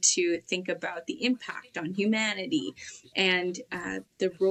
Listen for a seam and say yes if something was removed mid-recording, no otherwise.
no